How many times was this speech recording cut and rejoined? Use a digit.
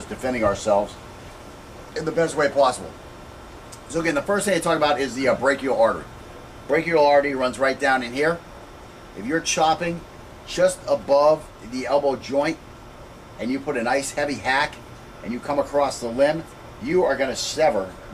1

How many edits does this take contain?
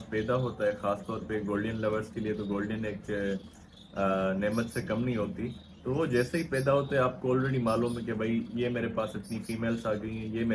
0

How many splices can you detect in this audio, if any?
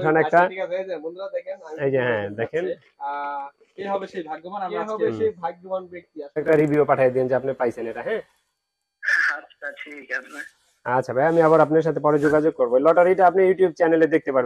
1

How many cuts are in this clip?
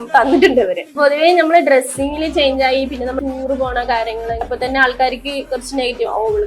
3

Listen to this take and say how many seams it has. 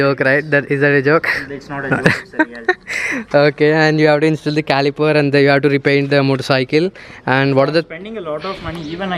0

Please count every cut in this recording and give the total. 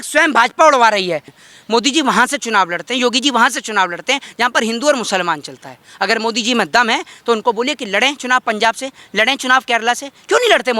1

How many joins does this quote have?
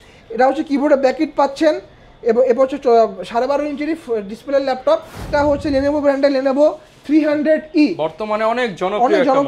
1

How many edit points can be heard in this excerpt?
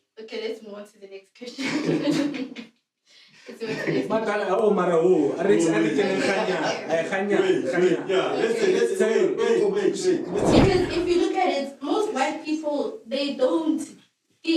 1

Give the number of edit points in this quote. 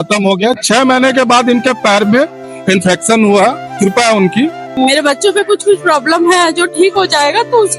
1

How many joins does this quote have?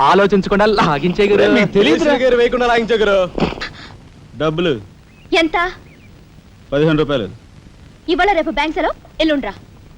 1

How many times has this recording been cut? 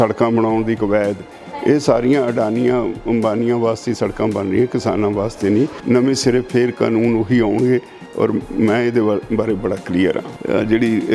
2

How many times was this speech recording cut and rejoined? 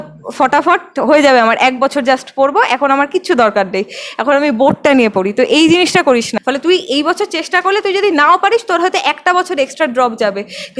1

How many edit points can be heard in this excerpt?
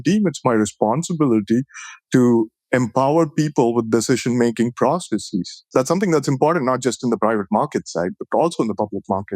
1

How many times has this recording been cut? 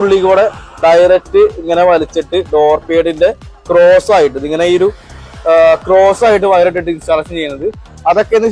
0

